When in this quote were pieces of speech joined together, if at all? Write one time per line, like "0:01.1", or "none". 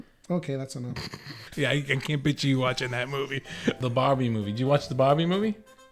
0:01.4
0:03.8